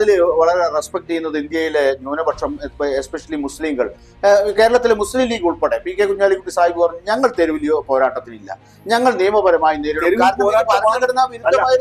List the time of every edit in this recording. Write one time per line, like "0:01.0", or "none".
none